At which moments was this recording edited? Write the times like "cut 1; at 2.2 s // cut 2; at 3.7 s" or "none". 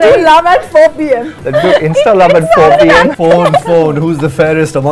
cut 1; at 1.3 s // cut 2; at 3.1 s